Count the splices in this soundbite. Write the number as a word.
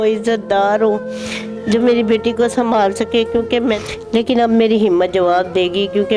one